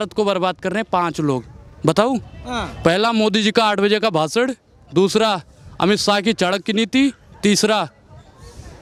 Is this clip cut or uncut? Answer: uncut